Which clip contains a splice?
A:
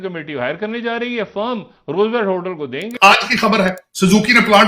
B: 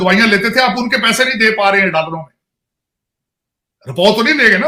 A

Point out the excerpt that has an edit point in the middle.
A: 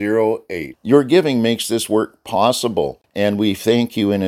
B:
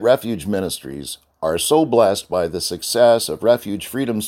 A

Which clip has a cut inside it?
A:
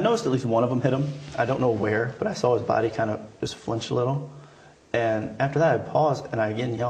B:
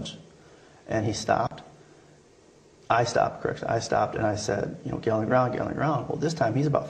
B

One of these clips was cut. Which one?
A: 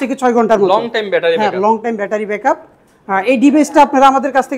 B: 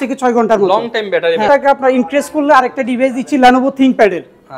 B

